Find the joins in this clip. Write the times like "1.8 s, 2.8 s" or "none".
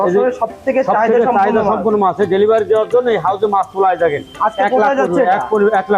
none